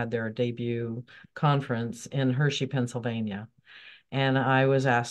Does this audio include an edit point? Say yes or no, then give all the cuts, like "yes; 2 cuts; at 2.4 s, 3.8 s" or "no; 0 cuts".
no; 0 cuts